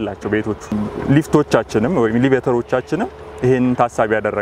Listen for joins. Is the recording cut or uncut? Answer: uncut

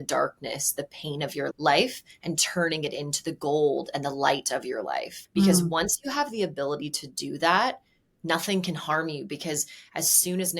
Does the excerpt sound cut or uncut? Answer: cut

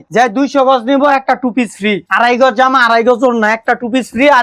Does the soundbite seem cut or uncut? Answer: uncut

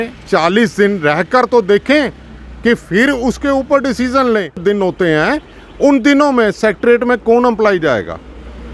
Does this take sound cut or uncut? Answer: cut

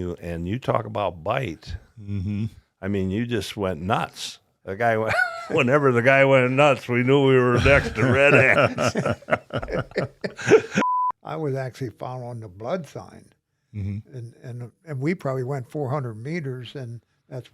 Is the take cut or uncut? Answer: cut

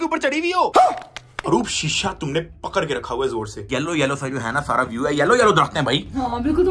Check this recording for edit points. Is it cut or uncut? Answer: cut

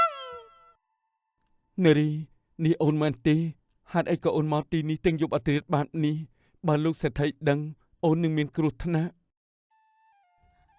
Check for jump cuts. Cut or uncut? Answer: uncut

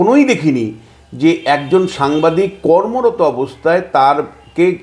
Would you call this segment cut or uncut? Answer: uncut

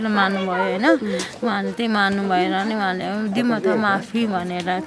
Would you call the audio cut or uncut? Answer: uncut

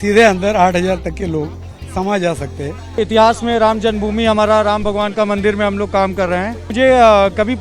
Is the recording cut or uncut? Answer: cut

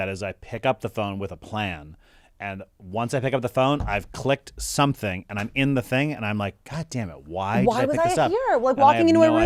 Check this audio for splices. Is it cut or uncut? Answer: uncut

